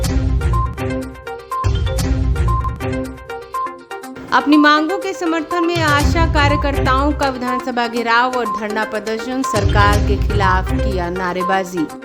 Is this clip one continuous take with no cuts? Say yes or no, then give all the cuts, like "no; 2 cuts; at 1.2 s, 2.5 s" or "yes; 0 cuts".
no; 1 cut; at 1.6 s